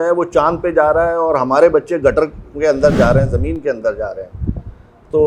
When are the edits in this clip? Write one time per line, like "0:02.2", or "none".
none